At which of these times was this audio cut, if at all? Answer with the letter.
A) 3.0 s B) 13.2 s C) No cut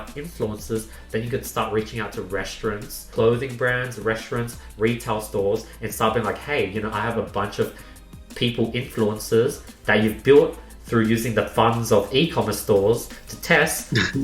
A